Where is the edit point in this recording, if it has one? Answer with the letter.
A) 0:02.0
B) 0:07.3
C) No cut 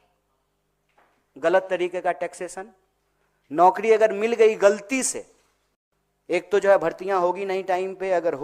C